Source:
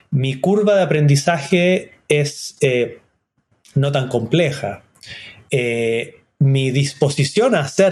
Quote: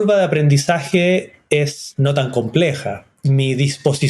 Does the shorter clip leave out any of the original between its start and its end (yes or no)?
yes